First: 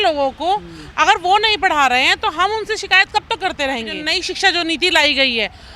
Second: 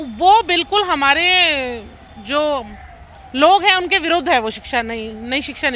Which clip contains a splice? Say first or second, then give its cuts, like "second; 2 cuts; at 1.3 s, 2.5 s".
first; 1 cut; at 4.0 s